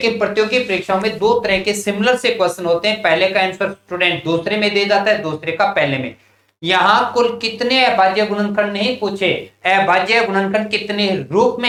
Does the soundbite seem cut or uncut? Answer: uncut